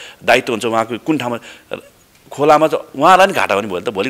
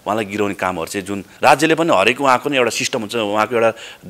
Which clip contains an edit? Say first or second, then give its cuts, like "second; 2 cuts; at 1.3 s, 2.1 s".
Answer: second; 1 cut; at 1.2 s